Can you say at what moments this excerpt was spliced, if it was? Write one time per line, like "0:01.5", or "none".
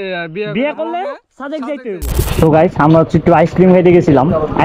0:02.1